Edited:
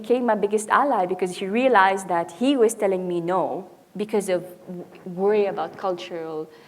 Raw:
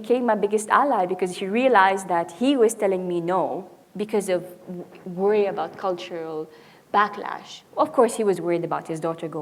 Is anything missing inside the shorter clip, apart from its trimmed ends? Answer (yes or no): no